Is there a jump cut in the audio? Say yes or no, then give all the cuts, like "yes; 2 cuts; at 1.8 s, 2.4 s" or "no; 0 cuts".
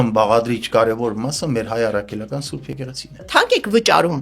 yes; 1 cut; at 3.2 s